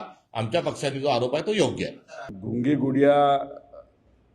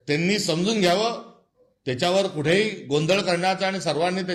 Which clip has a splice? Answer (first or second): first